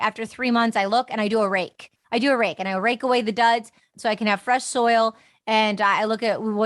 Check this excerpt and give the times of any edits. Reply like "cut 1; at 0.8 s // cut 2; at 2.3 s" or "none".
cut 1; at 3.9 s